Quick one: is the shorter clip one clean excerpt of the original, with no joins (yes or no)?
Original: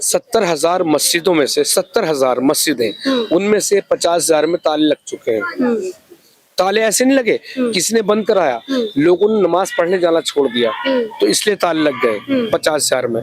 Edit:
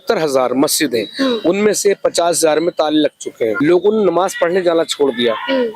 no